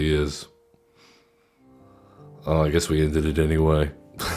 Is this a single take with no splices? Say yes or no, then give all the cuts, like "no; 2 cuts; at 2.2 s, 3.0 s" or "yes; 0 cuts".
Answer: no; 1 cut; at 1.7 s